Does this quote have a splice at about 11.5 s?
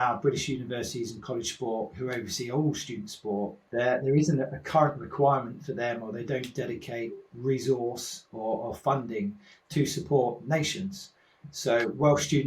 no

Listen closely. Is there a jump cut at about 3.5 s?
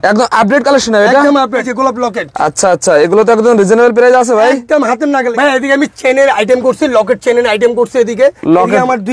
no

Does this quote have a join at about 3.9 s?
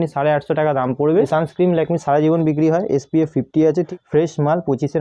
yes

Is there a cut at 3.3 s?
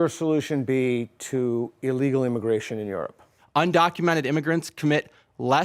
yes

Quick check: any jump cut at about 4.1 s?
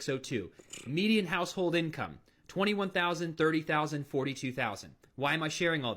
yes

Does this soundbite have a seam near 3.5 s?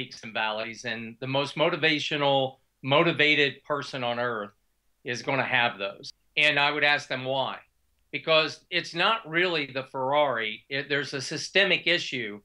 no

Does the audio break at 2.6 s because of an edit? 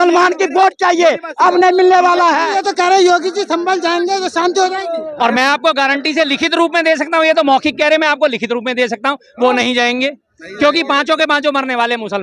yes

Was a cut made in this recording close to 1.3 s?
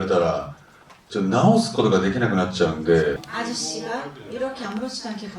no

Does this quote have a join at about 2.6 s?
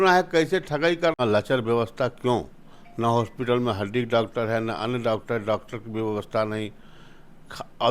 no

